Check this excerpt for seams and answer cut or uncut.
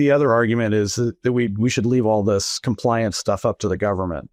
uncut